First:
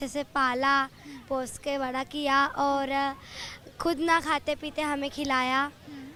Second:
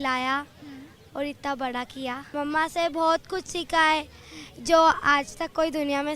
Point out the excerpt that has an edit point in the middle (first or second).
second